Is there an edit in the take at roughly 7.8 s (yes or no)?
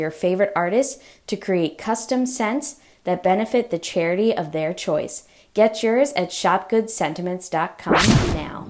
yes